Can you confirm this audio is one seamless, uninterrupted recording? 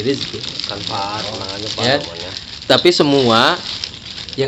yes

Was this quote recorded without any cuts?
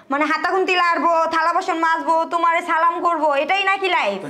yes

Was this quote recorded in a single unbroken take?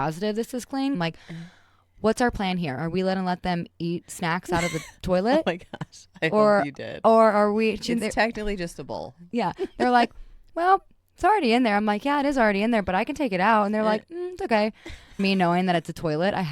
no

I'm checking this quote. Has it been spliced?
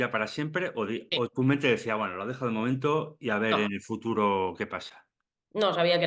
no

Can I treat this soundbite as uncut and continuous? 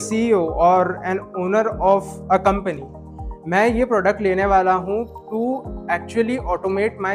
yes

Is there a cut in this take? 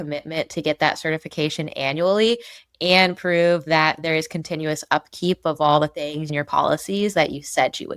yes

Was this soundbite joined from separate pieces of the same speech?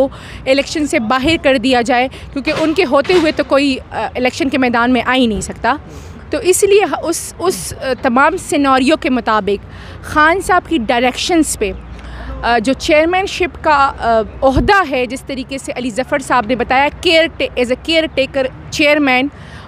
no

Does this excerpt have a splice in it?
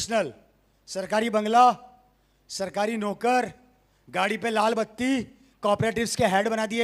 no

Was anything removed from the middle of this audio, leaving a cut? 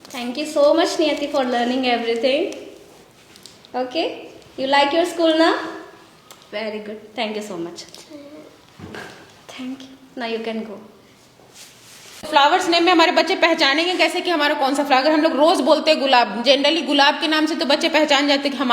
yes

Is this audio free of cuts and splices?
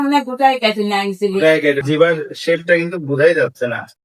no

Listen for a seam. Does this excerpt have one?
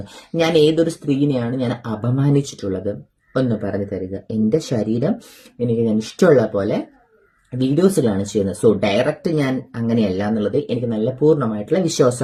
no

